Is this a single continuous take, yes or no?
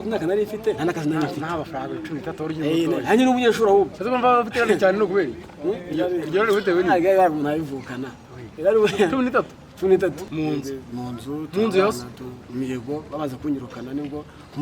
no